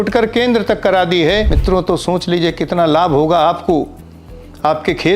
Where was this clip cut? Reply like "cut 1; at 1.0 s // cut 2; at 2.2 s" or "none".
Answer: cut 1; at 1.5 s